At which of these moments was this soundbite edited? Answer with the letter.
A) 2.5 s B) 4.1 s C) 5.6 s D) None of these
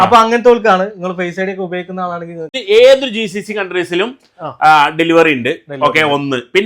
A